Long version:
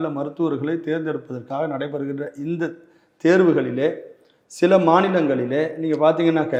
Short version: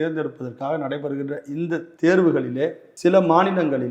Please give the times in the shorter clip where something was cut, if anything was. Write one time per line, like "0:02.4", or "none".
0:01.9
0:02.8